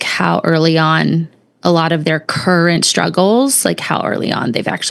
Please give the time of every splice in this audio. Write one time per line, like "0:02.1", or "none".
none